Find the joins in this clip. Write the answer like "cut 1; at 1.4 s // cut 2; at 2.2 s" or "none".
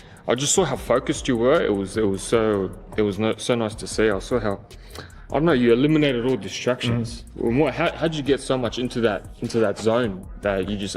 cut 1; at 9.4 s